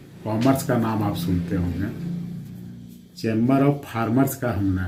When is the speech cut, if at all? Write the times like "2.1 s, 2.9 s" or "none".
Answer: none

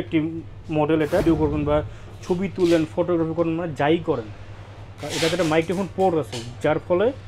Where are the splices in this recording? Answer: 1.2 s

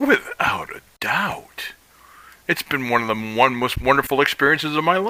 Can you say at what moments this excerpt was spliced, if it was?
none

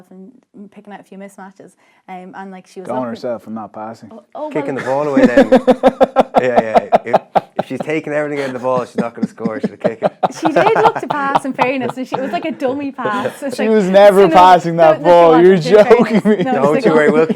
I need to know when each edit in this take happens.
none

